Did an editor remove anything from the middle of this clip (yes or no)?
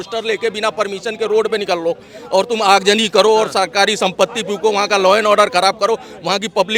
no